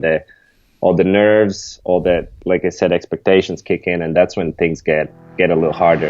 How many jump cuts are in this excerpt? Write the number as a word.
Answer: one